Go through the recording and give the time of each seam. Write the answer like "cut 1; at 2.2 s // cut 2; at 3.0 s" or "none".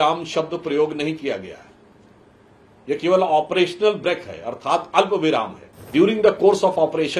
cut 1; at 5.9 s